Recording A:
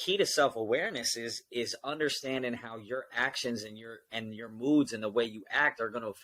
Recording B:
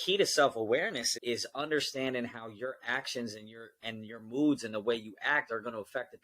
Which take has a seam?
B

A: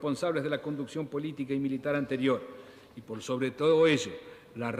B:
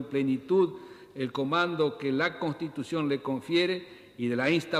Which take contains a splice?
B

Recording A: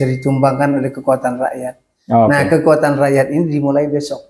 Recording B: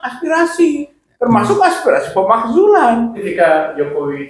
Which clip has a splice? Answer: B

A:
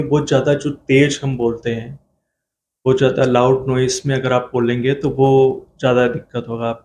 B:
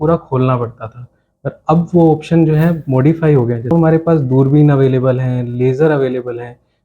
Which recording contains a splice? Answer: B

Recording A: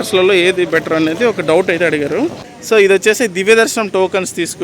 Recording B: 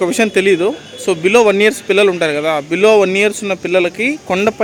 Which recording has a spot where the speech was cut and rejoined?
A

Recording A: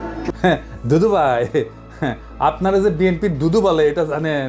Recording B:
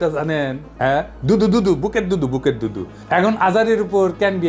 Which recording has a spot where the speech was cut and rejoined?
B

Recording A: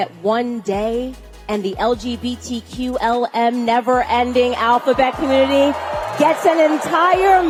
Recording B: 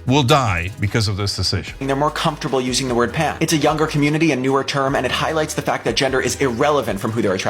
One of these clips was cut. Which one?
B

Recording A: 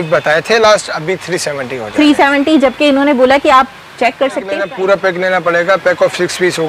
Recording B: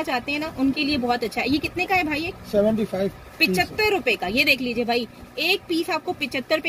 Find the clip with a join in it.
A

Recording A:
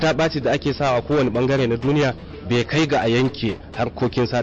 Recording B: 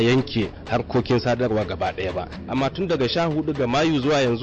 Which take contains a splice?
B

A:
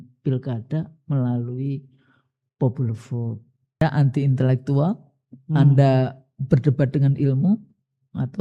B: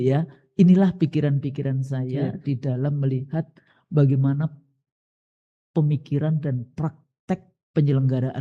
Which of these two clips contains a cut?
A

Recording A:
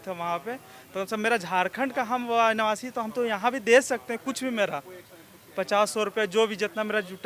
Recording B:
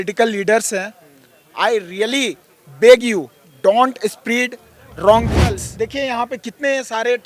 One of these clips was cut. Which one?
B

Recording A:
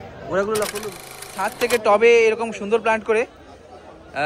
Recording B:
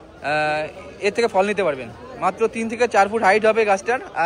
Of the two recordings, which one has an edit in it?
A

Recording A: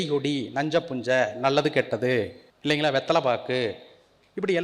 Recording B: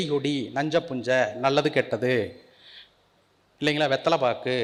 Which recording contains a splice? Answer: A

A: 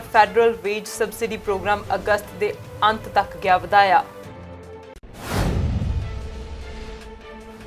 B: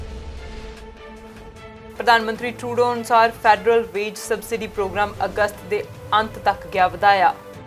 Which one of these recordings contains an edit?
B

